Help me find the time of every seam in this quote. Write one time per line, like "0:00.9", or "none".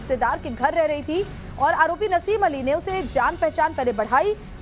none

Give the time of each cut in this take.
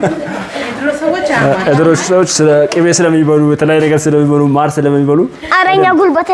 none

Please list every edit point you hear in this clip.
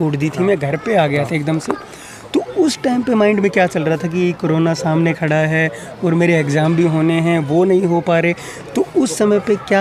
none

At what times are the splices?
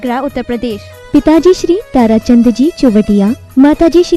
none

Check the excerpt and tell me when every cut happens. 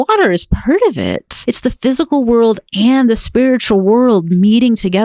0:01.3

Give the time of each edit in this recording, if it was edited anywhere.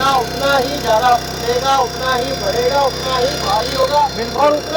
none

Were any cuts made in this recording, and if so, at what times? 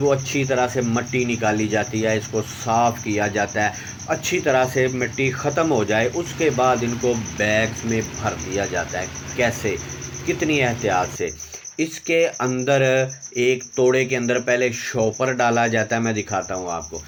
none

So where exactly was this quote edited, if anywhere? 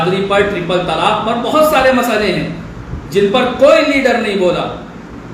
none

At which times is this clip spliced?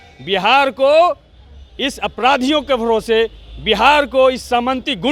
none

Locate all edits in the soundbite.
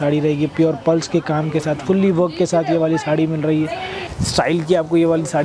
0:04.0

